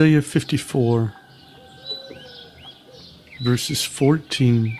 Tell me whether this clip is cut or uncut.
cut